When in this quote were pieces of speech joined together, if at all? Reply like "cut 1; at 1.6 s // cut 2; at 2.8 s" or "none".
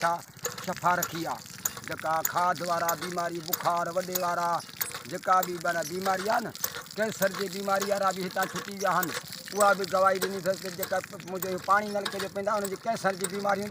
none